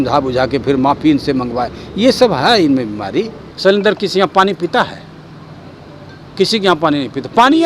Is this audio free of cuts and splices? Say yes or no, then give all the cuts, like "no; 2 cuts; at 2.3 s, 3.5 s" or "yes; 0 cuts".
no; 1 cut; at 3.4 s